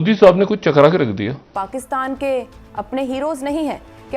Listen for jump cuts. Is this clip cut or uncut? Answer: cut